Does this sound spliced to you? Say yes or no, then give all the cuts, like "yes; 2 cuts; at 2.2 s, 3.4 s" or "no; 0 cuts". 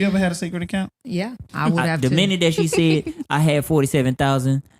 yes; 1 cut; at 1.4 s